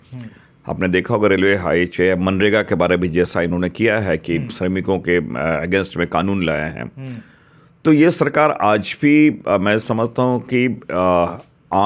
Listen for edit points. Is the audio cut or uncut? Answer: uncut